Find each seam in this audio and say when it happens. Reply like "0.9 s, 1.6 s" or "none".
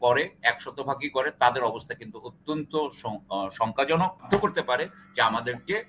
4.3 s